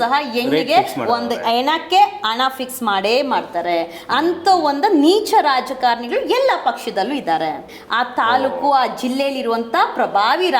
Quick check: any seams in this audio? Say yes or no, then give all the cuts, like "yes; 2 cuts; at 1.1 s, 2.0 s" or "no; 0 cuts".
yes; 1 cut; at 7.7 s